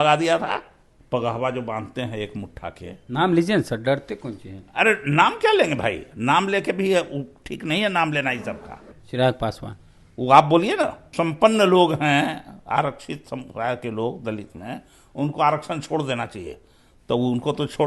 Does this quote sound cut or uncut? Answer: cut